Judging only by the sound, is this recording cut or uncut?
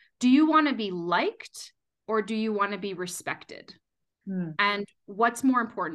uncut